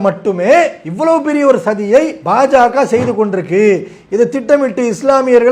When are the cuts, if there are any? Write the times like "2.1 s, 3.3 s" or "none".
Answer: none